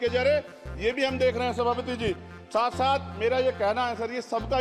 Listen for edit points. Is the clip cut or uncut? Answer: uncut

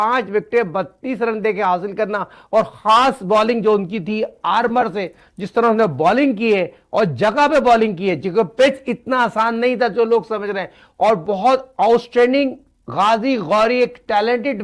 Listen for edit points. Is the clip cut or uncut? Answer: uncut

